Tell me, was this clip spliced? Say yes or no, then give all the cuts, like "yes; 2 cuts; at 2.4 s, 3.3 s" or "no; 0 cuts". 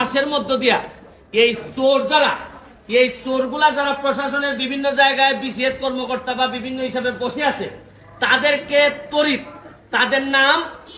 no; 0 cuts